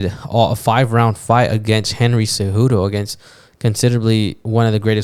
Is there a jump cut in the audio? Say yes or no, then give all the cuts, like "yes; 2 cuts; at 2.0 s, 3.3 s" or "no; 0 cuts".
no; 0 cuts